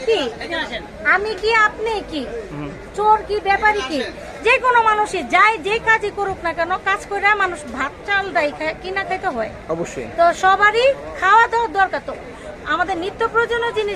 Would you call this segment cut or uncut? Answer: uncut